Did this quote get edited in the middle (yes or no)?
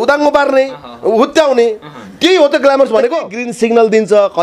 yes